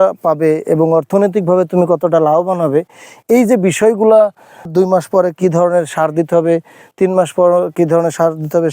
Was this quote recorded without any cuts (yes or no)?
no